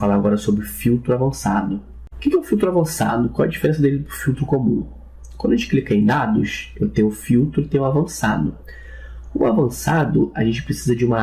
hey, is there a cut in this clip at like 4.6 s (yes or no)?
yes